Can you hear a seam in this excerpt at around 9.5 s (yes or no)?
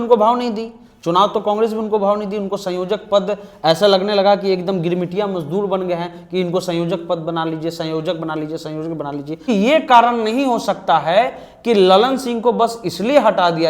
yes